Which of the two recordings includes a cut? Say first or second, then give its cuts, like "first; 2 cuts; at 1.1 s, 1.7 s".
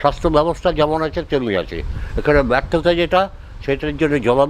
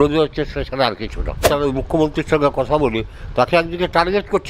second; 1 cut; at 1.4 s